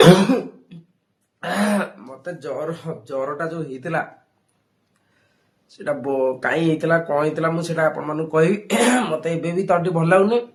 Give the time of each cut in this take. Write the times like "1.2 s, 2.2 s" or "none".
none